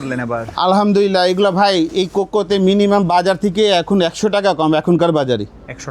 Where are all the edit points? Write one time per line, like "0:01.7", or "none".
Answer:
none